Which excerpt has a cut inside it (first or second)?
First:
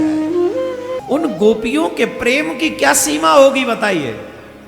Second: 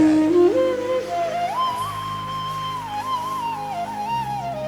first